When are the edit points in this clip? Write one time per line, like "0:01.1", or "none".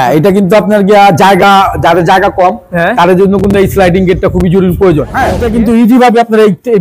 0:05.4